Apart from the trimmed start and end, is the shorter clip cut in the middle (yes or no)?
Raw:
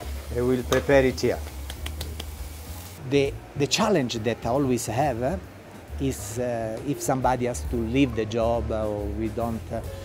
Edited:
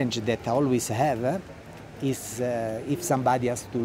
no